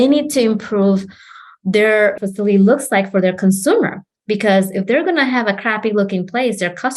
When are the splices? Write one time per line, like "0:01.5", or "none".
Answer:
0:02.2